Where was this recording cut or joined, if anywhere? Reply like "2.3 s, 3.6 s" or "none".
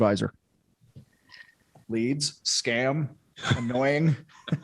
1.8 s